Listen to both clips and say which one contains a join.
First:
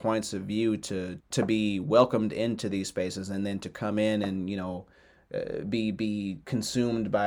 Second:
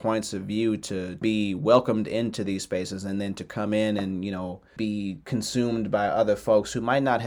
second; 2 cuts; at 1.2 s, 4.8 s

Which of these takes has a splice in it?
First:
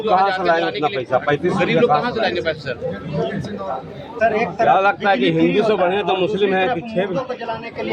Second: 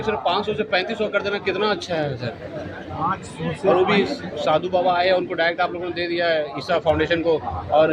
first; 1 cut; at 4.2 s

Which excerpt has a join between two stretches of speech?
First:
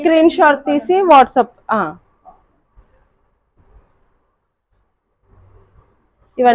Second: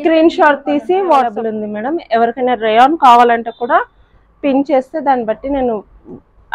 second; 1 cut; at 1.3 s

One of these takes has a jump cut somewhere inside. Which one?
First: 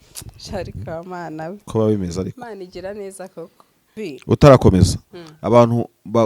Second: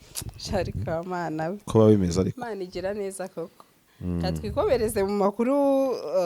first; 1 cut; at 3.9 s

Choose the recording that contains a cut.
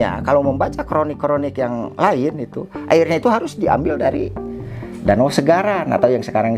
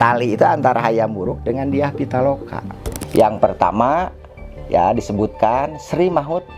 second; 1 cut; at 2.9 s

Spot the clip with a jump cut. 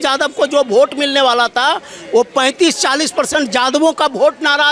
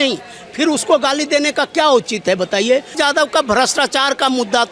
second; 1 cut; at 3.0 s

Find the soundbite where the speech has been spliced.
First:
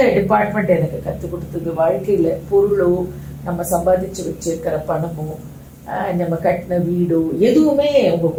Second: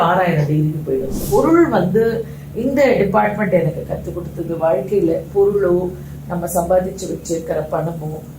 second; 1 cut; at 1.2 s

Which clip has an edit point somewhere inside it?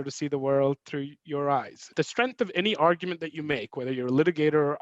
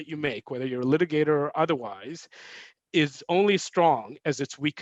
first; 1 cut; at 1.9 s

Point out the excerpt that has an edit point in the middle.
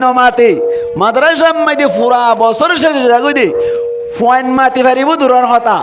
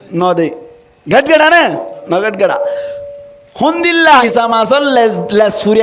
second; 1 cut; at 4.2 s

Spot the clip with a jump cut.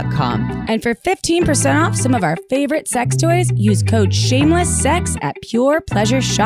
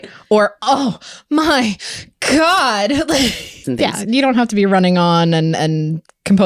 second; 1 cut; at 3.5 s

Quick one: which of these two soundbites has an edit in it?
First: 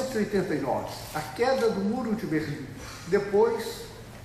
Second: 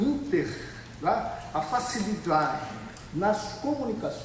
second; 1 cut; at 0.9 s

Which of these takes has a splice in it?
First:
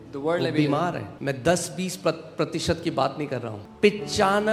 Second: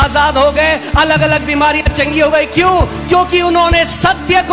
first; 2 cuts; at 1.1 s, 3.6 s

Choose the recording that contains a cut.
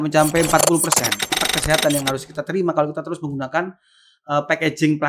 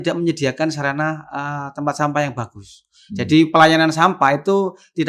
first; 1 cut; at 1.4 s

